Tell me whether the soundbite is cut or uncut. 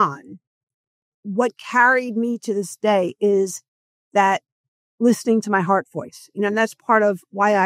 cut